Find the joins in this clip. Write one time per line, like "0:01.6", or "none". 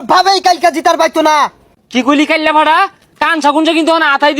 0:01.6